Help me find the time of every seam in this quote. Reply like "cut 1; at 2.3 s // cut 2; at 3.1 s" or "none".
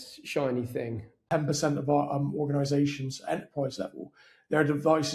cut 1; at 1.2 s